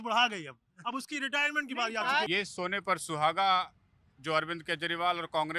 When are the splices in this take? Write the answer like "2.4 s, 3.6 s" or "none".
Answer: 2.3 s

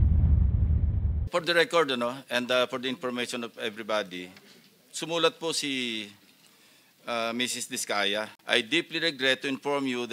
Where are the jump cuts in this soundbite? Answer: 1.3 s, 8.4 s

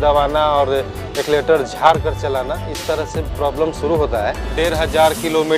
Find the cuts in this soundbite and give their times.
4.4 s

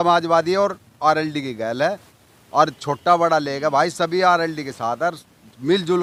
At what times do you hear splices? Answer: none

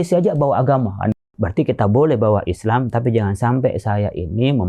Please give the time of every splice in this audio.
1.1 s

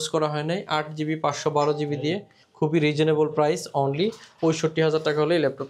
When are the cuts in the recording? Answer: none

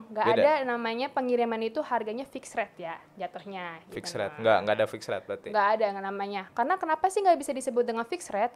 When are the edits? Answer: none

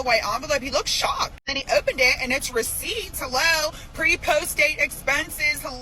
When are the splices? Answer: 1.5 s

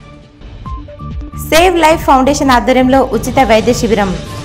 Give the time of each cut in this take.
none

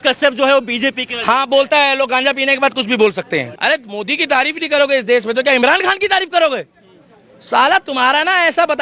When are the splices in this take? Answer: 3.5 s

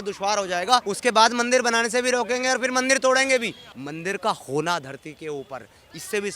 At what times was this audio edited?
0.9 s, 3.7 s

